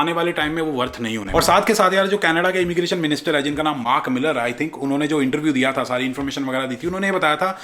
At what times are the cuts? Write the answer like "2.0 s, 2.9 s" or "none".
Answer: none